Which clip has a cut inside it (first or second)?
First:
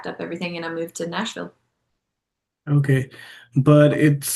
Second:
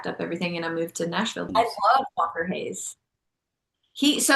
second